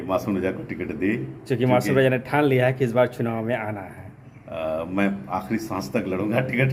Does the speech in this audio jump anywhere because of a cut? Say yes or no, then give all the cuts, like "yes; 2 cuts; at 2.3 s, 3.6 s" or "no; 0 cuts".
no; 0 cuts